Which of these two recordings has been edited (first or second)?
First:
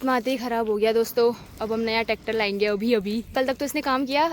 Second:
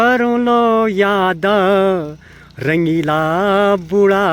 first